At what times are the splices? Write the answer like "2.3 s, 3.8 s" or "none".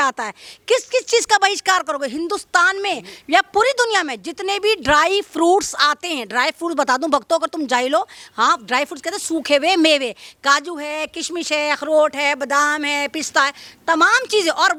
none

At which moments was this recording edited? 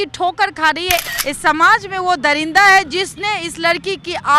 1.0 s

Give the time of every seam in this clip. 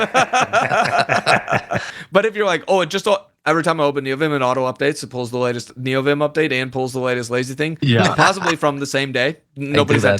1.9 s

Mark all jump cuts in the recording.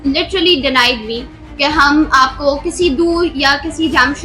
none

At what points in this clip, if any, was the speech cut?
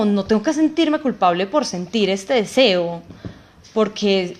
none

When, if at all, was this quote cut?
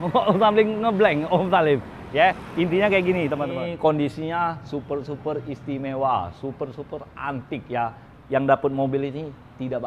3.5 s

